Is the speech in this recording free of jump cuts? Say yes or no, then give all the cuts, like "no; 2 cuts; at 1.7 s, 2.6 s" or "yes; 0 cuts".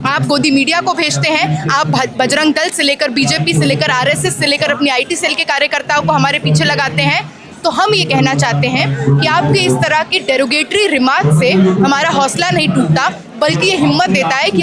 yes; 0 cuts